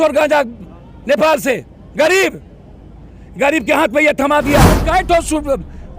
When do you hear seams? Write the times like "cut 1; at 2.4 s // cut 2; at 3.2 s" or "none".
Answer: cut 1; at 4.8 s